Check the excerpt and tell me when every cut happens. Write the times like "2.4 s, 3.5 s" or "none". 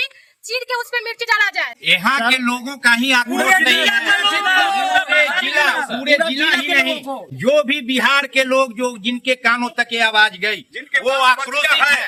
none